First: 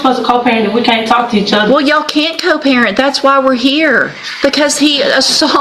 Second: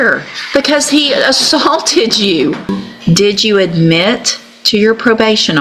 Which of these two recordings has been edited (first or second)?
second